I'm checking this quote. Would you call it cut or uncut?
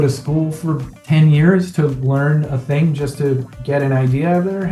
uncut